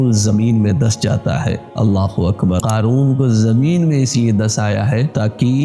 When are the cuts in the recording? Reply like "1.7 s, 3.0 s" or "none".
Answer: 2.6 s